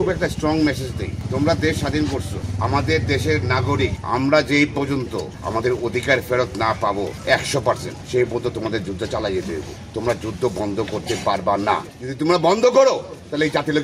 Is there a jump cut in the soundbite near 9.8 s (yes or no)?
yes